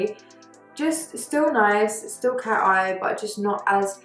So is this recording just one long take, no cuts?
yes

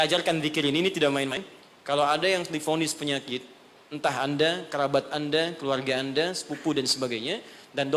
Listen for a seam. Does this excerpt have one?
yes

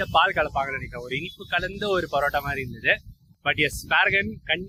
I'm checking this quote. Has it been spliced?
no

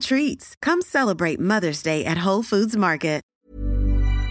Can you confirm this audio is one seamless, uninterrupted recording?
no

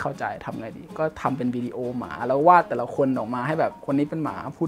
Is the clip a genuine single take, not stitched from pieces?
yes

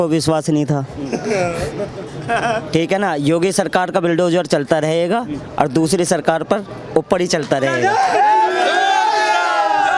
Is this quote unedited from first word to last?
yes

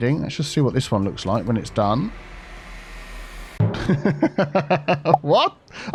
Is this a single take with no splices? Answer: yes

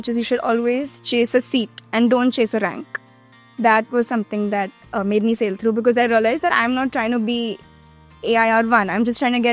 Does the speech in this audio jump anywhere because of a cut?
no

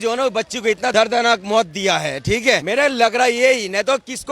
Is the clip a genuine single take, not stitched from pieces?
no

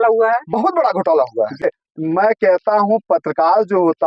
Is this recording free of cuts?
no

